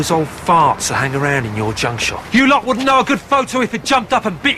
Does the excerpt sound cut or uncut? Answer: cut